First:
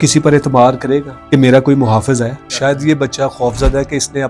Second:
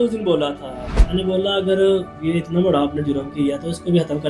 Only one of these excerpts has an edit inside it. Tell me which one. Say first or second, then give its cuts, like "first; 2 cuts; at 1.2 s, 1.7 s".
first; 2 cuts; at 1.1 s, 2.4 s